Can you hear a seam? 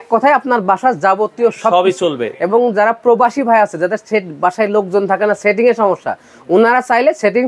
no; 0 cuts

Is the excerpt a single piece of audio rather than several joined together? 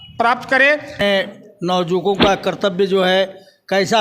no; 1 cut; at 1.0 s

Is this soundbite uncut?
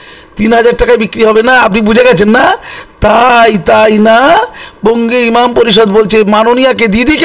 yes; 0 cuts

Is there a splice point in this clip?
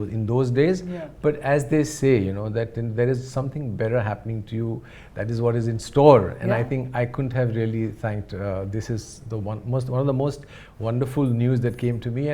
no; 0 cuts

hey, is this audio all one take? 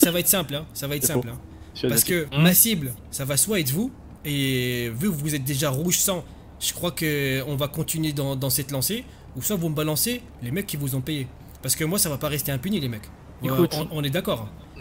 yes; 0 cuts

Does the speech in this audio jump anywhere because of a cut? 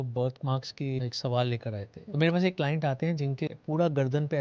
yes; 3 cuts; at 1.0 s, 2.1 s, 3.5 s

